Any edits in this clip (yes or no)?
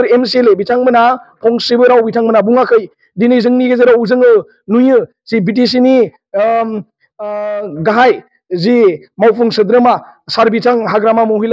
no